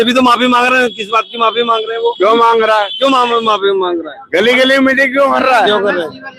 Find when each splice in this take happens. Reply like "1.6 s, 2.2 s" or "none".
none

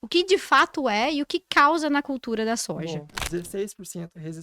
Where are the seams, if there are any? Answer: 3.2 s

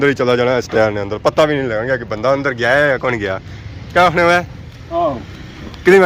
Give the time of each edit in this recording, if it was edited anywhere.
none

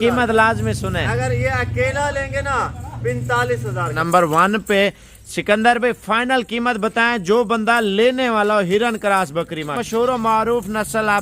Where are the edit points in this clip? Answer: 4.0 s, 9.8 s

